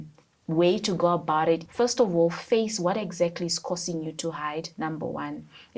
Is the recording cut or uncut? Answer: cut